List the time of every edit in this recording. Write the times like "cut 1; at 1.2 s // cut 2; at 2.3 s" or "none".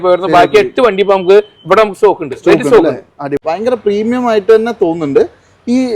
cut 1; at 3.3 s